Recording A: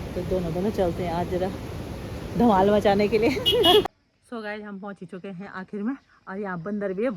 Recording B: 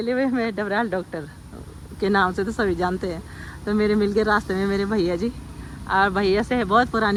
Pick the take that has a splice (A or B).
A